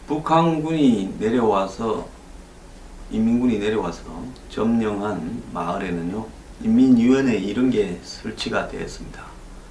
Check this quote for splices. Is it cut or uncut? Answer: uncut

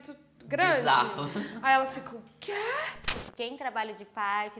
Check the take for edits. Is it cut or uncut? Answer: cut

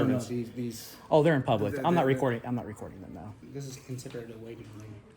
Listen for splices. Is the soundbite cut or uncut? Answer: cut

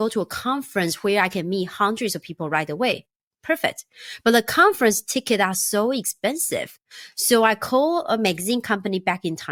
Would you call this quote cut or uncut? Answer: uncut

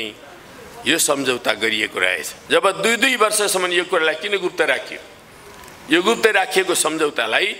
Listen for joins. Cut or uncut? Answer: cut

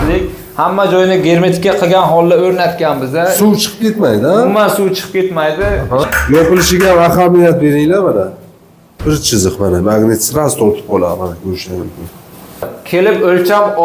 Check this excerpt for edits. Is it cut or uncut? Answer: cut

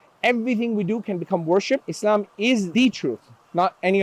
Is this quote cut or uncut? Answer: cut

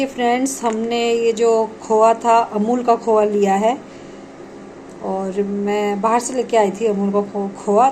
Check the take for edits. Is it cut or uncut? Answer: uncut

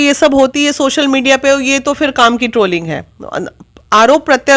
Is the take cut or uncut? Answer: uncut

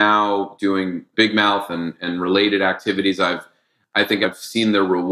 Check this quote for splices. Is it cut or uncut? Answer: cut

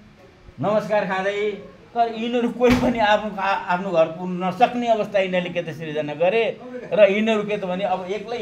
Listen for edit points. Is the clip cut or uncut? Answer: uncut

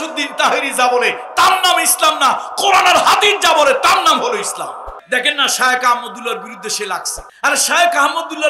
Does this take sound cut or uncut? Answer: cut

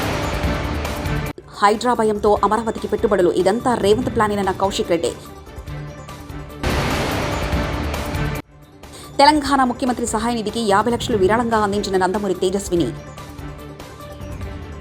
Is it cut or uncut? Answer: uncut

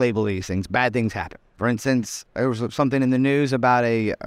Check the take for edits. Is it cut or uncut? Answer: cut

